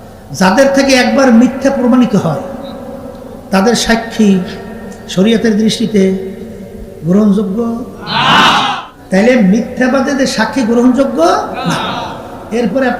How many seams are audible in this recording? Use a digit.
1